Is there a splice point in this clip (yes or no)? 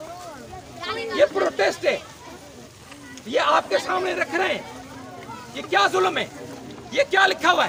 no